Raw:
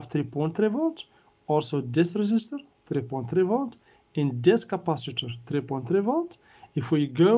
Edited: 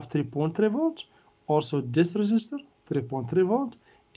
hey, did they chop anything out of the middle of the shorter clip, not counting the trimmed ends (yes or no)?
no